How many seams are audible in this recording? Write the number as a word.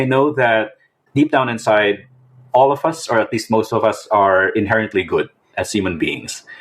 one